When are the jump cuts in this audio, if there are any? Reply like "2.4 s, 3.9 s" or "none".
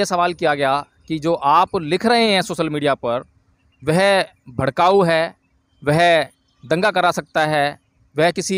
none